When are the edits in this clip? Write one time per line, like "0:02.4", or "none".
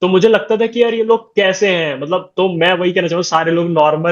none

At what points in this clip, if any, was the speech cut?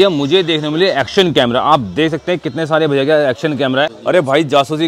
0:03.9

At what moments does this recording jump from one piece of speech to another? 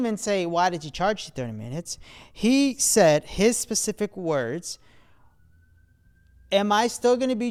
none

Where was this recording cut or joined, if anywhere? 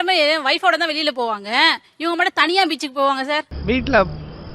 none

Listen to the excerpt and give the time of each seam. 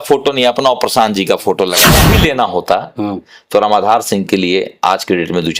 0:01.9

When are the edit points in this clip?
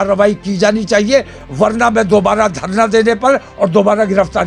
none

